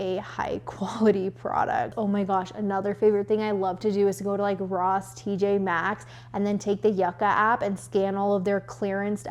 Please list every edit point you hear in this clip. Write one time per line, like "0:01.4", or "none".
0:01.9